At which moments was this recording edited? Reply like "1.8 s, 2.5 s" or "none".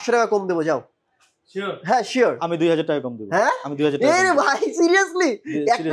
none